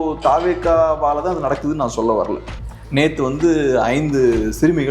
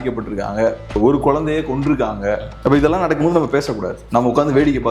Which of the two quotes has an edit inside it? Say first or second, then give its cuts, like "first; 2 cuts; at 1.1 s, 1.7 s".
first; 1 cut; at 2.5 s